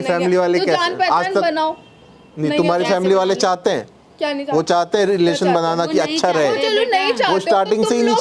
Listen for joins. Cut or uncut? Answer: uncut